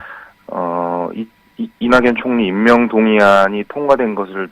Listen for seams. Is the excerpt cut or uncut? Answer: cut